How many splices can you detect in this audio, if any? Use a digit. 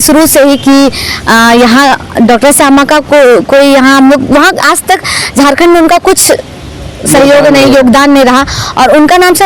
0